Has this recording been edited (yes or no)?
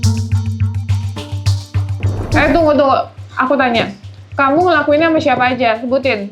yes